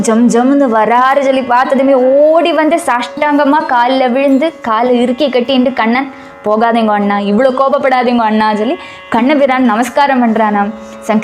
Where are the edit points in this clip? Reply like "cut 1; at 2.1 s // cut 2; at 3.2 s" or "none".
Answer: none